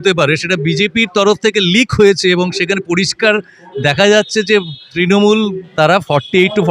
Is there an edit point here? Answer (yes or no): yes